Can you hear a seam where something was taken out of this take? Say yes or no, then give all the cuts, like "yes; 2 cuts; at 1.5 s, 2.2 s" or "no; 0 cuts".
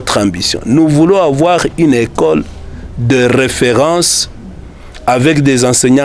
no; 0 cuts